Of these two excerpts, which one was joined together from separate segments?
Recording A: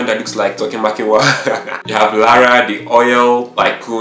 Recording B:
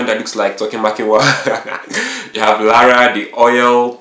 A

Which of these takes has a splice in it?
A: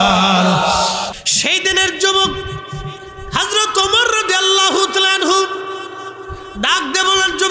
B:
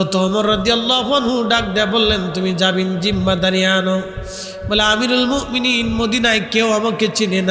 A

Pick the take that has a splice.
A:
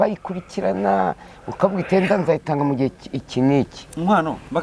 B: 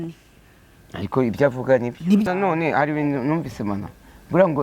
B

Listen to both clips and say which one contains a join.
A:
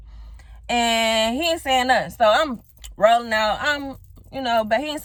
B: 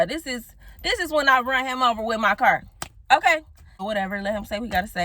B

